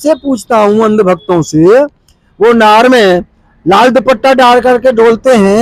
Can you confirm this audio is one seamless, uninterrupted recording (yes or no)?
yes